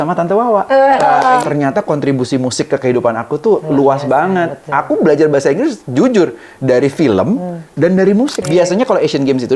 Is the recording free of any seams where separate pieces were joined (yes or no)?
no